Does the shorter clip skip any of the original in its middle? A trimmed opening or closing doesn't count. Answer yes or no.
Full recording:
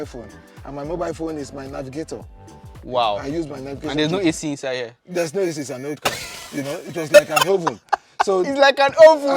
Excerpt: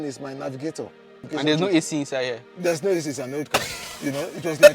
yes